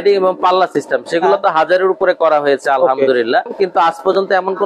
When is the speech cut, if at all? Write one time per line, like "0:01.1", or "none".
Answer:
0:03.5